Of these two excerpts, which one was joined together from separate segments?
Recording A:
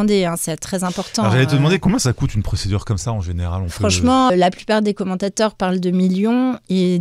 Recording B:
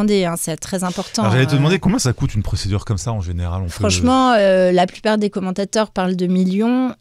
A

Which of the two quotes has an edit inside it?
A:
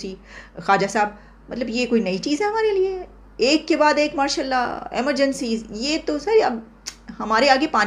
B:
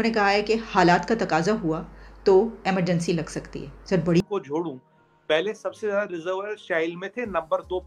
B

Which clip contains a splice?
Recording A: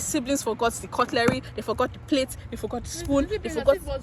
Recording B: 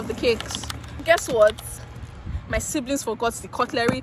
B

